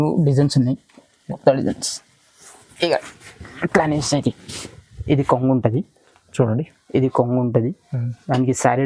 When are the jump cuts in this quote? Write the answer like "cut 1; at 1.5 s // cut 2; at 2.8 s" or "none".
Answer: none